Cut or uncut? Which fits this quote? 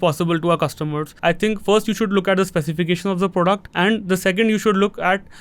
cut